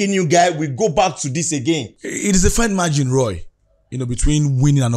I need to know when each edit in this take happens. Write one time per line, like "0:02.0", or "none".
0:02.0